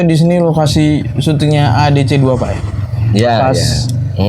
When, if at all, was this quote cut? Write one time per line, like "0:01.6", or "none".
none

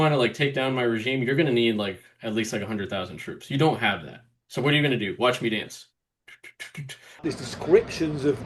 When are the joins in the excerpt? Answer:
0:07.2

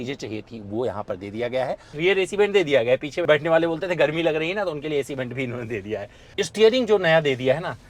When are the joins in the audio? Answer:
0:02.0
0:03.1
0:06.3

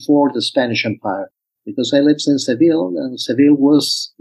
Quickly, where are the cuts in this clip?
0:01.4

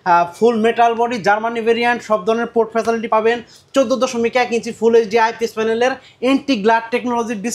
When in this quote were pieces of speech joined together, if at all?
0:03.0

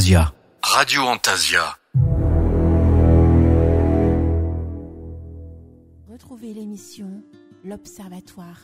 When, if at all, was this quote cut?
0:05.6

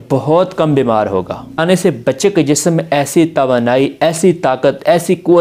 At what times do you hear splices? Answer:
0:01.6

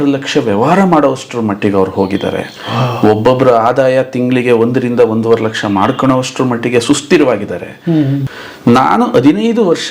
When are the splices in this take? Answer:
0:08.3

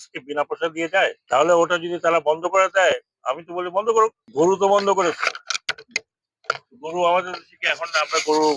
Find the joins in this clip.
0:01.2

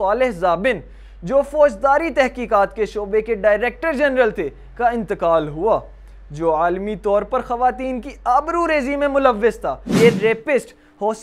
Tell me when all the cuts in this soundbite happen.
0:09.8

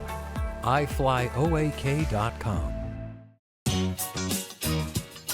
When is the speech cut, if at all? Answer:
0:03.5

